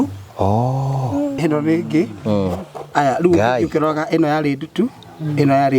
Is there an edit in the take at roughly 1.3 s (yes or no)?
yes